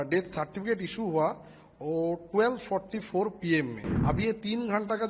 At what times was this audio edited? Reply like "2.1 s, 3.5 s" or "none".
3.9 s